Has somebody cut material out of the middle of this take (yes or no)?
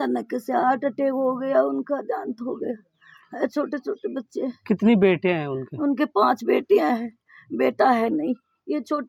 no